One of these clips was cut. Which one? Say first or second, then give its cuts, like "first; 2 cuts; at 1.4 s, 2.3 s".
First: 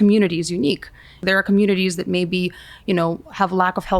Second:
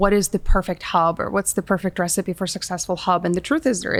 first; 1 cut; at 1.2 s